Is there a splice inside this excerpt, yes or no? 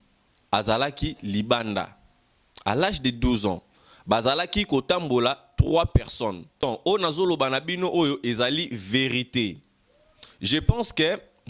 yes